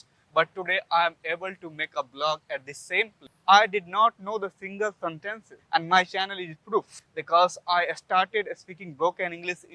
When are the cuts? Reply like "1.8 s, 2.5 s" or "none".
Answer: 3.2 s